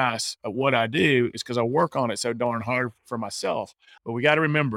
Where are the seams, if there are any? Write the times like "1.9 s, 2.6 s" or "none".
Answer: 3.8 s